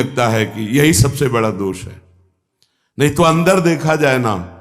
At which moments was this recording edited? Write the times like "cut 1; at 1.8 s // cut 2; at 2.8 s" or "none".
none